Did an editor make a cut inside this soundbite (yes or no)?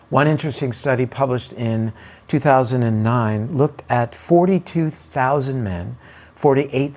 no